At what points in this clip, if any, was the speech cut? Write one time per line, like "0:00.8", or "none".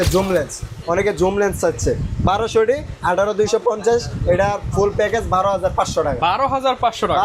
none